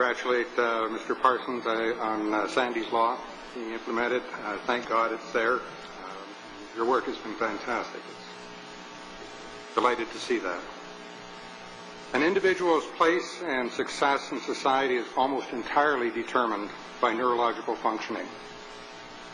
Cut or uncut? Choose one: cut